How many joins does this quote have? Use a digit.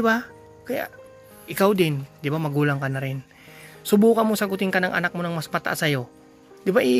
1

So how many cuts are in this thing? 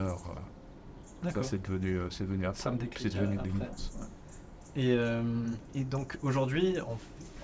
0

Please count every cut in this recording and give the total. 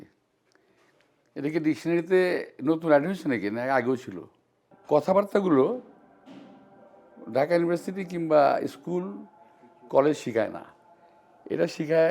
1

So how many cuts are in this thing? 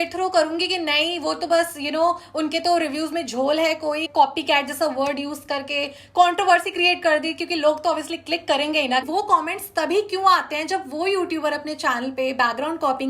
2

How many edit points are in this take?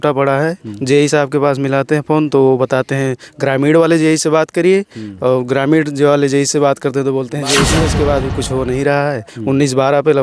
1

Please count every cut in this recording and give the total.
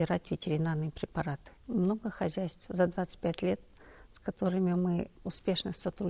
2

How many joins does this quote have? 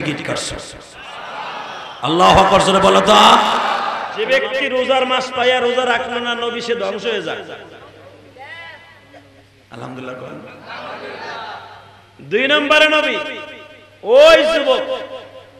1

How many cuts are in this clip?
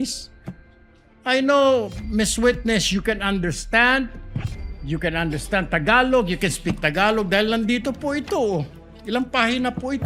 0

